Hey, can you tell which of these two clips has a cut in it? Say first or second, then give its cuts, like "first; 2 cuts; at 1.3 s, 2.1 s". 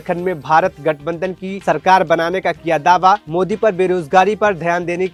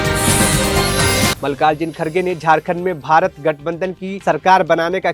second; 1 cut; at 1.4 s